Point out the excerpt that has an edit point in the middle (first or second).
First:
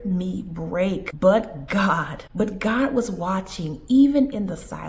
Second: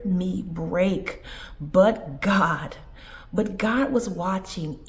first